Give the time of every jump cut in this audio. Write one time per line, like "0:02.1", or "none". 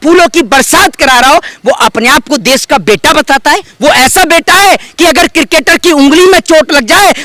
0:03.7